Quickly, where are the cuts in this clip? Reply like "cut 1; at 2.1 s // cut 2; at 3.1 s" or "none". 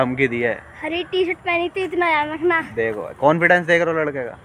none